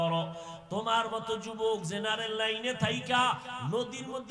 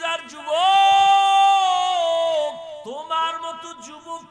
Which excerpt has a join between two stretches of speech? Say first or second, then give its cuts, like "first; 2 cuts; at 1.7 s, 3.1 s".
second; 1 cut; at 2.8 s